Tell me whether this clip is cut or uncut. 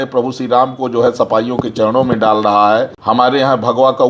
cut